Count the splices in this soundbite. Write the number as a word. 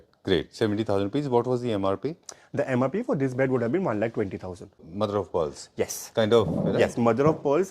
one